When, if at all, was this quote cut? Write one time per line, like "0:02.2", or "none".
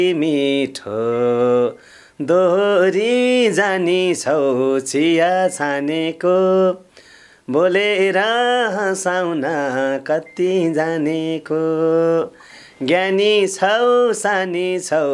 none